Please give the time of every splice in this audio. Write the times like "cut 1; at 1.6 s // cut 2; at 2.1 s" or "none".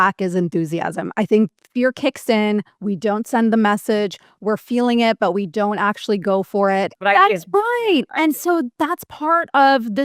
cut 1; at 6.9 s